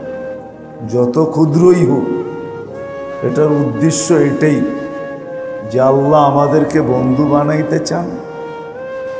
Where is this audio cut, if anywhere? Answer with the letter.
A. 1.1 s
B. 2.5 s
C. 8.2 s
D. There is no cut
C